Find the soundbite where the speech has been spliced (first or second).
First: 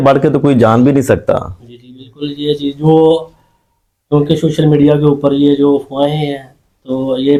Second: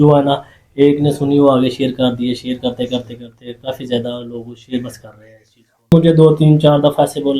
second